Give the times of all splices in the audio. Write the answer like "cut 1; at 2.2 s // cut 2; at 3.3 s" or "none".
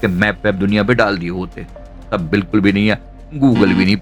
none

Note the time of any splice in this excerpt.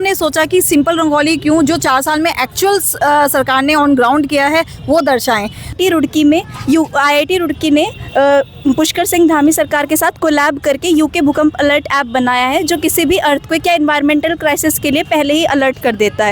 cut 1; at 5.8 s

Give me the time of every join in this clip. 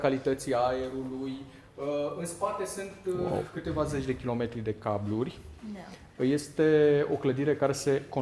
none

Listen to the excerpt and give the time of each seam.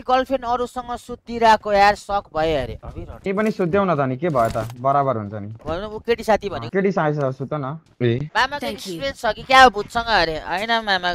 cut 1; at 2.8 s // cut 2; at 5.5 s // cut 3; at 8.3 s

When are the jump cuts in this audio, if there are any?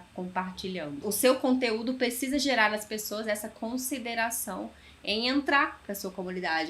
cut 1; at 1.0 s

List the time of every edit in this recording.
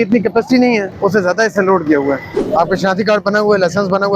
cut 1; at 0.9 s // cut 2; at 2.3 s

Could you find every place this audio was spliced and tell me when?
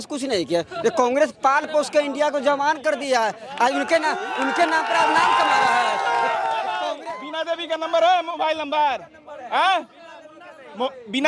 cut 1; at 7.0 s

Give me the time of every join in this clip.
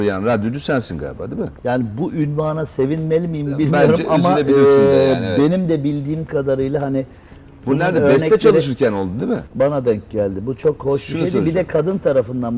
none

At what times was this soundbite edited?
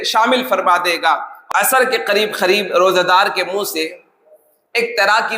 cut 1; at 1.3 s

